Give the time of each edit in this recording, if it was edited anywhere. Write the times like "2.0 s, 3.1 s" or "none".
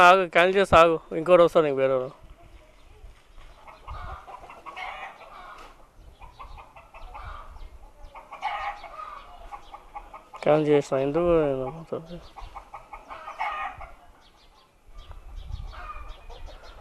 3.6 s